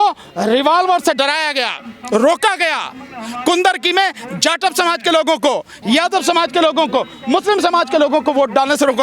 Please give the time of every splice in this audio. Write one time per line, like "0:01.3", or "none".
none